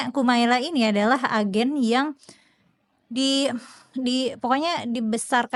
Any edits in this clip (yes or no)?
no